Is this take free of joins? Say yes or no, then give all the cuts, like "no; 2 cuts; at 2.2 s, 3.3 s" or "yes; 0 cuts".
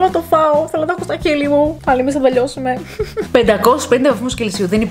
no; 1 cut; at 3.3 s